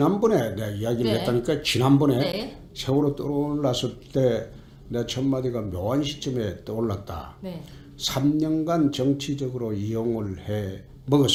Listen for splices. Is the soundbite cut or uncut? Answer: uncut